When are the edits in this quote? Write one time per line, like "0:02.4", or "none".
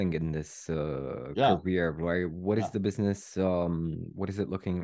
none

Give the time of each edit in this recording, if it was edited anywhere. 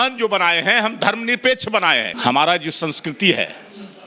0:02.1

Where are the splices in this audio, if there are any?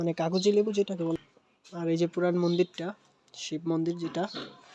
0:01.5

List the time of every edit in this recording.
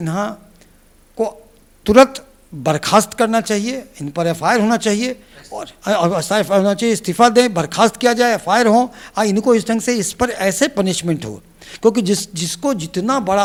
none

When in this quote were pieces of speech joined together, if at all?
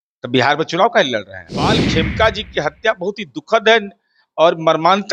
0:01.8

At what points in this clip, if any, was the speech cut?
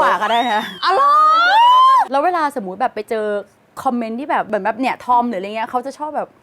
0:02.1
0:04.5

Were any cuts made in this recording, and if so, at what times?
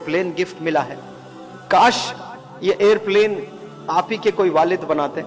none

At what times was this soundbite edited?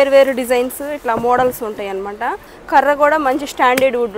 0:02.5

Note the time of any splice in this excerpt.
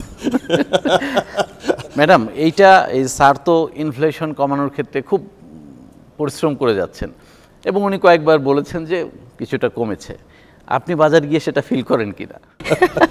none

